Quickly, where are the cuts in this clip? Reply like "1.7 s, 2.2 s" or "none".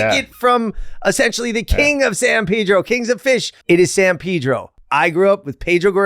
3.5 s, 4.7 s